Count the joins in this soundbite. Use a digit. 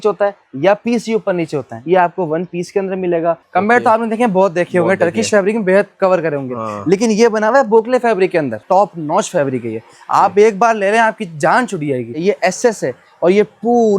4